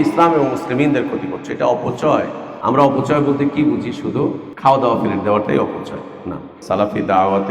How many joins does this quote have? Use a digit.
3